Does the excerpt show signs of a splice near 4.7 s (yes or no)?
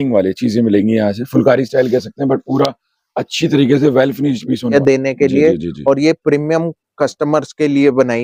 yes